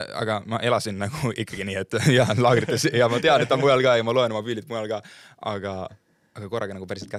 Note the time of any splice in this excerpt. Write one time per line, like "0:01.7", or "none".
none